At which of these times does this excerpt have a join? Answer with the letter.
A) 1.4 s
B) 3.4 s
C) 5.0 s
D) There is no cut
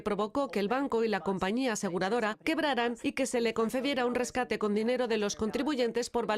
C